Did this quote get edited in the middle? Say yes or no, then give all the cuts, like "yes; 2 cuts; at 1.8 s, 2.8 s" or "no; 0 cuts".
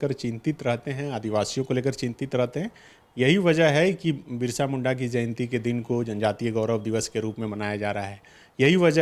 no; 0 cuts